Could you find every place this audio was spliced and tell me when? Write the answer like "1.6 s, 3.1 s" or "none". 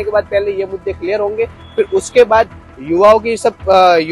none